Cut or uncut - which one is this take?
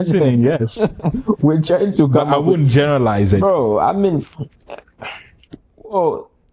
uncut